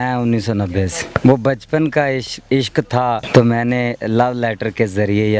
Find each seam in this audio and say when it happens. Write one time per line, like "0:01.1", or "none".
0:01.0
0:03.2